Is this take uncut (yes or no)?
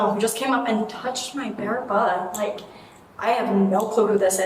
yes